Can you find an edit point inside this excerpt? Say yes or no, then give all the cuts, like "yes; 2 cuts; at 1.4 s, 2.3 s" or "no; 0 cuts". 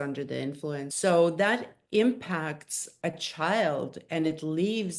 yes; 1 cut; at 0.9 s